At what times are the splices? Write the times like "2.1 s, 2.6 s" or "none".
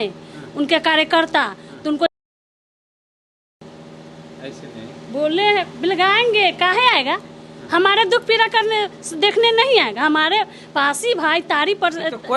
none